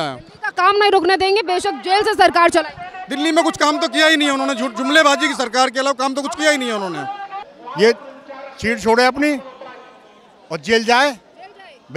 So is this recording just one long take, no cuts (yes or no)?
no